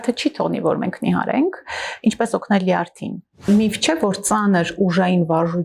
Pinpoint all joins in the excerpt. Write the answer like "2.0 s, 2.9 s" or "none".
3.5 s